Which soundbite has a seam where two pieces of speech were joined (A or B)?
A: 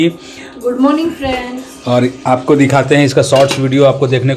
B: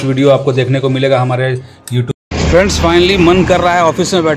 B